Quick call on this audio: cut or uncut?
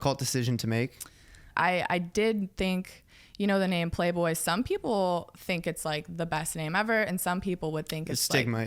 cut